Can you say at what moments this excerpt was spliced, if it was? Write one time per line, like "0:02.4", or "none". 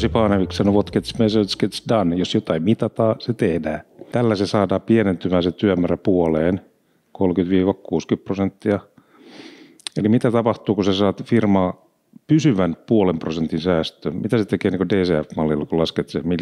0:03.9